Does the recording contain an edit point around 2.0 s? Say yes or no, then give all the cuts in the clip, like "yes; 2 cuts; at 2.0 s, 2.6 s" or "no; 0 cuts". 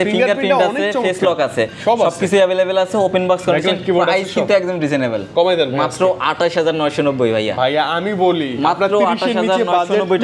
no; 0 cuts